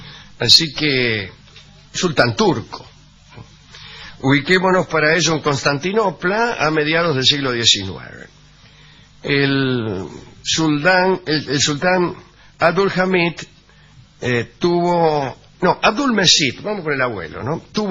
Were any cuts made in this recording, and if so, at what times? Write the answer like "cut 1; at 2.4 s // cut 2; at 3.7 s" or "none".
cut 1; at 16.6 s